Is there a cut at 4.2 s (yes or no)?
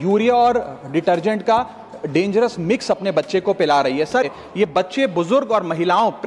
yes